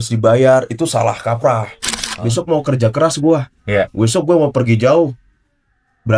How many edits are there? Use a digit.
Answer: 1